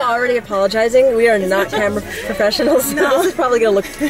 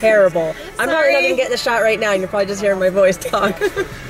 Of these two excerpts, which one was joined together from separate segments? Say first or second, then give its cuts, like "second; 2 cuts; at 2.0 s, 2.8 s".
first; 1 cut; at 3.2 s